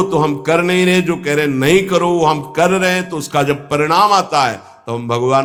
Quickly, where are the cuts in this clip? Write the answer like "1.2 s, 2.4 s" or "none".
none